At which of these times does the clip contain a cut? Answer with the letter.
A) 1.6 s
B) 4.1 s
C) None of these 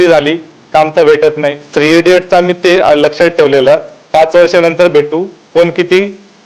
A